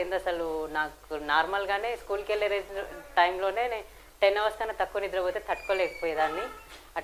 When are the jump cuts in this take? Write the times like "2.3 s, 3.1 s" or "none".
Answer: none